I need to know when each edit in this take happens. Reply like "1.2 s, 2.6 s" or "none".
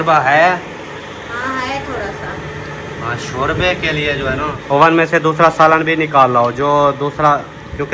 4.6 s